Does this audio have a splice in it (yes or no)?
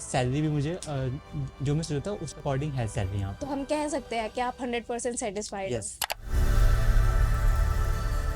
yes